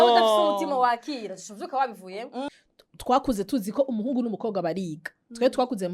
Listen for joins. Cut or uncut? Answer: cut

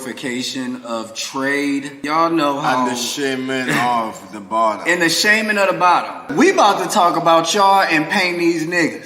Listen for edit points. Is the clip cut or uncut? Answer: cut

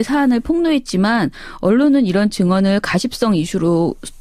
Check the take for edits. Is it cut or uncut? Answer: uncut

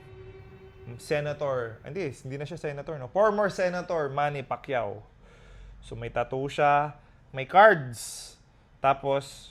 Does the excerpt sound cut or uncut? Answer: uncut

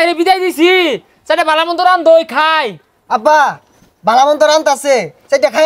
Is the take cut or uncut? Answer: uncut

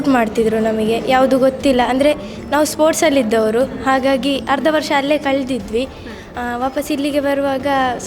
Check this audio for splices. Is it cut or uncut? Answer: uncut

